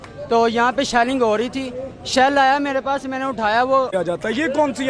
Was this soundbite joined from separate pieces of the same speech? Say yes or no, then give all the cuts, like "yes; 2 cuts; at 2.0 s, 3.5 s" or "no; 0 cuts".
yes; 1 cut; at 3.9 s